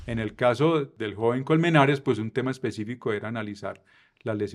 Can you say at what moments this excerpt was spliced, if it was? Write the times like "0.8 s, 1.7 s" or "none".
0.9 s